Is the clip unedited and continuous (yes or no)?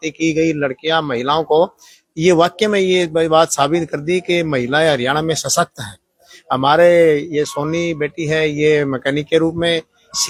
yes